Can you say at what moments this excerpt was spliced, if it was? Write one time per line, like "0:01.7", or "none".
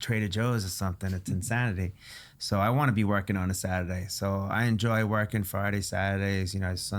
none

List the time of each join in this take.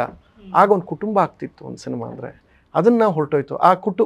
none

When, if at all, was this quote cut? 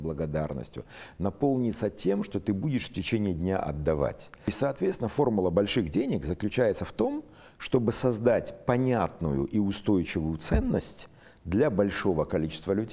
0:04.5

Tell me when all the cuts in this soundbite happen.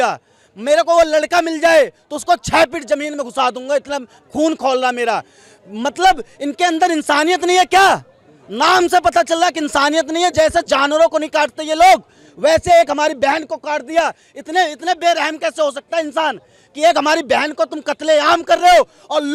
none

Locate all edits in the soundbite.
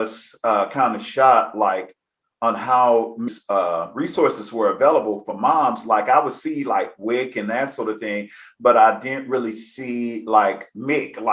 0:03.3

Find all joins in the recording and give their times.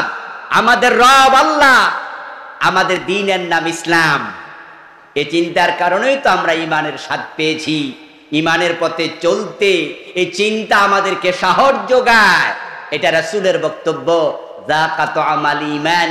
none

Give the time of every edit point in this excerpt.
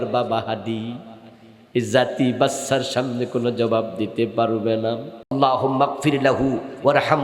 0:05.3

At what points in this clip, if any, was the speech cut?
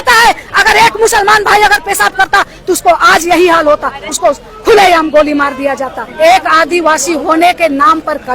0:06.0

